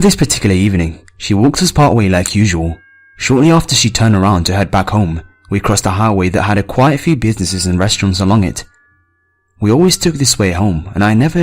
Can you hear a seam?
yes; 1 cut; at 6.5 s

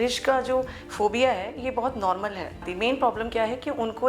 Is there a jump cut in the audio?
yes; 1 cut; at 2.6 s

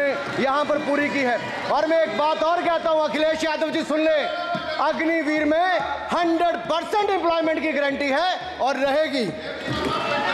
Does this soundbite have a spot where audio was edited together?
no; 0 cuts

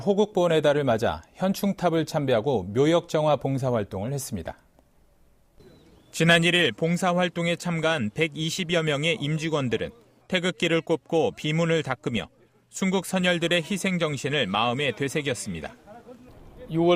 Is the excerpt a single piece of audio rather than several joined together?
yes; 0 cuts

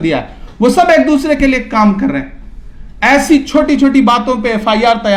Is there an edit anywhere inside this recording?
no; 0 cuts

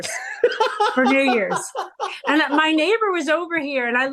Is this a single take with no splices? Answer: yes; 0 cuts

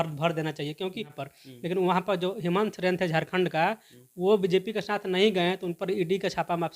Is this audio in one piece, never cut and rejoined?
no; 1 cut; at 1.2 s

